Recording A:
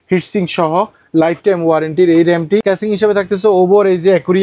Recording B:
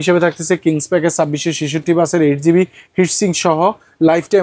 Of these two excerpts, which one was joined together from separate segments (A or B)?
A